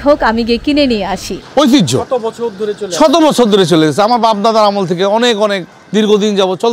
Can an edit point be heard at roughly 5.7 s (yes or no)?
no